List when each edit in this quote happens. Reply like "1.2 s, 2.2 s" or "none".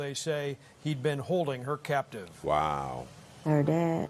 none